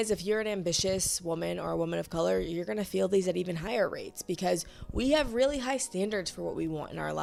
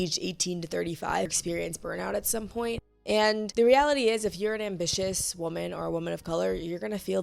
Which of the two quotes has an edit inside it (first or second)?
second